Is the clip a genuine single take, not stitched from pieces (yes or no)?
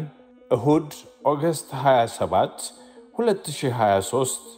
yes